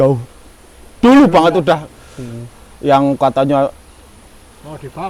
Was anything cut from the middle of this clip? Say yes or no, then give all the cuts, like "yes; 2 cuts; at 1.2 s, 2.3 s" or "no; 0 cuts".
no; 0 cuts